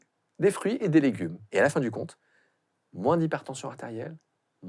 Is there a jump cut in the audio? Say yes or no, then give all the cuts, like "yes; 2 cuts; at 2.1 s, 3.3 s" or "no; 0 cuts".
yes; 1 cut; at 1.3 s